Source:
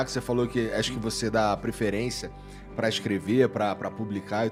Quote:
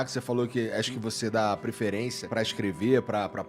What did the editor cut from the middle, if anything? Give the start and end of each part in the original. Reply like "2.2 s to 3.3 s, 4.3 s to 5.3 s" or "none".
2.2 s to 2.7 s